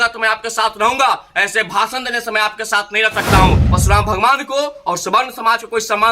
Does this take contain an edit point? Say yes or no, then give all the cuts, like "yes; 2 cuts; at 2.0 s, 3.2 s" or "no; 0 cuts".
yes; 1 cut; at 3.7 s